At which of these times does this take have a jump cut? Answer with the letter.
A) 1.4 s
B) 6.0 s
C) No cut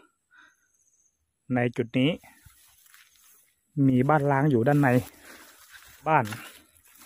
B